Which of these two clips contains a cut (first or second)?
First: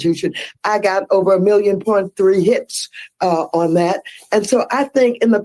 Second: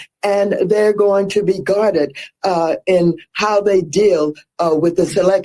first